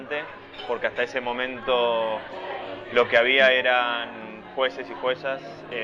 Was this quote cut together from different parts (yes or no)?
yes